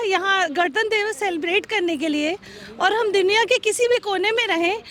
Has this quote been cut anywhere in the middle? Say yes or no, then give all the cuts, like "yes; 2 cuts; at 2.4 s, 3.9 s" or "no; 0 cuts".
no; 0 cuts